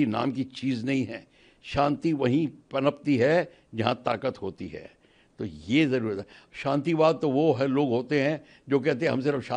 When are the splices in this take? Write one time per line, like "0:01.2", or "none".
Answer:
none